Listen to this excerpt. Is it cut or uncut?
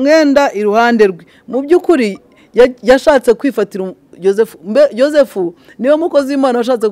uncut